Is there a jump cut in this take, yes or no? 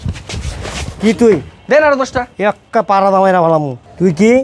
no